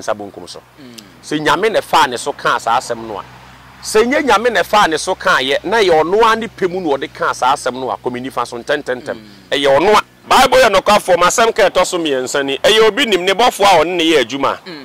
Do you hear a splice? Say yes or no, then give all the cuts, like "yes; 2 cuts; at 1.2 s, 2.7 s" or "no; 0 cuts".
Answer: yes; 1 cut; at 10.1 s